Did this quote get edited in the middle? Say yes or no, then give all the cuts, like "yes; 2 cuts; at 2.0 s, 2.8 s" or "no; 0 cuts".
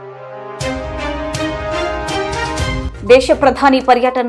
yes; 1 cut; at 2.9 s